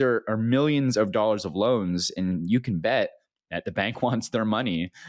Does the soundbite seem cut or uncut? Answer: uncut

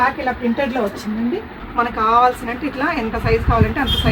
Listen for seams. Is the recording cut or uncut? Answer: cut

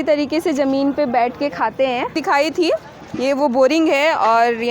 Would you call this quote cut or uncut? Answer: cut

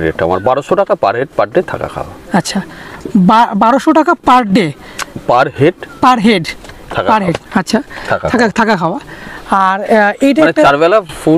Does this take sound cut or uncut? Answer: uncut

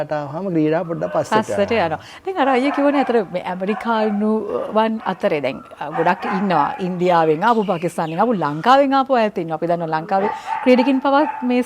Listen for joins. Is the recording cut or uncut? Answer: uncut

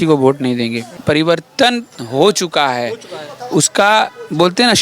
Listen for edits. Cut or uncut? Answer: cut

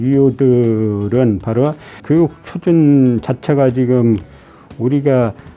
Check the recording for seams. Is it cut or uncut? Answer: cut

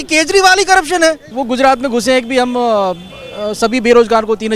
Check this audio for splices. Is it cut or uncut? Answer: cut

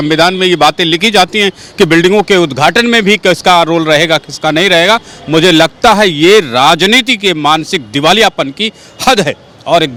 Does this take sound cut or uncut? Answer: uncut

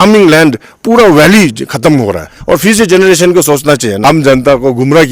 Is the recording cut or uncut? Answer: cut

